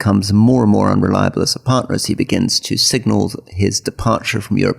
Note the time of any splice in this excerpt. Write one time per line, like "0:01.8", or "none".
none